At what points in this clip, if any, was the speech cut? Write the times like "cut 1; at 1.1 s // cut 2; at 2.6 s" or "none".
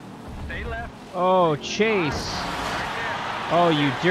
none